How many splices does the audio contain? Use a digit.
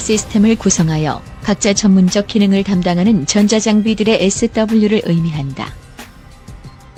0